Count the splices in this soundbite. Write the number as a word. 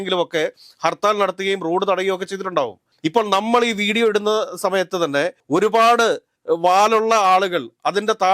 three